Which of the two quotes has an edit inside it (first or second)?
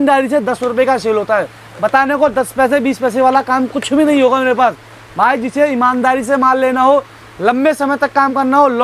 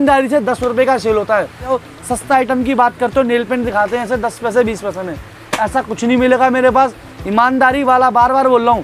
second